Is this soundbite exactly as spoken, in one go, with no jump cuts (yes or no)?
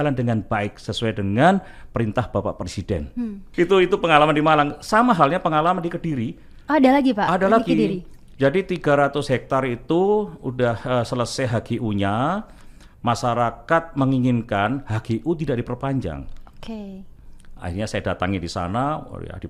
yes